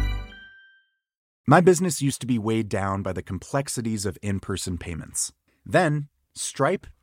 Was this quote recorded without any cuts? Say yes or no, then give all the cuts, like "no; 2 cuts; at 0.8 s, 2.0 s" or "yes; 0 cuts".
no; 1 cut; at 1.2 s